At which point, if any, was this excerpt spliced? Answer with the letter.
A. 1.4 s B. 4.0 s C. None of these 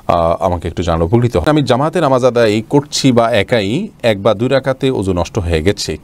A